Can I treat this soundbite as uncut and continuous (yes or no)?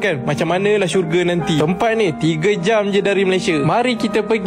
yes